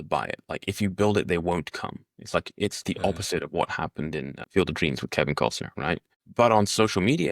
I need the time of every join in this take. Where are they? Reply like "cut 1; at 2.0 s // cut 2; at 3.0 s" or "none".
cut 1; at 4.4 s // cut 2; at 6.2 s